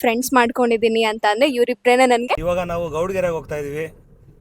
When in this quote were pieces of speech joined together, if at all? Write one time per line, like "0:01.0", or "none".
0:02.4